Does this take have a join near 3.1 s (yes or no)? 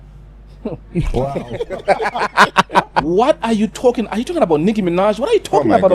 yes